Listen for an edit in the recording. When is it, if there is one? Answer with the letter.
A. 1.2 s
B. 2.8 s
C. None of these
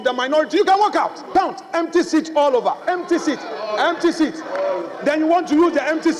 A